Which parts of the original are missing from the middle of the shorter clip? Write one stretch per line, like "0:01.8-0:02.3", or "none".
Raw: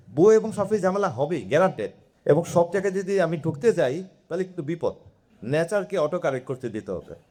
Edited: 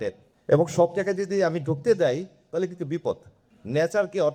none